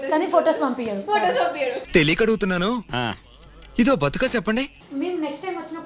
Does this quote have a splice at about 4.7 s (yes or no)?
yes